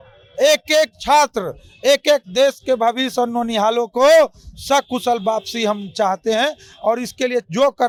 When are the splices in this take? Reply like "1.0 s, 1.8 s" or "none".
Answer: none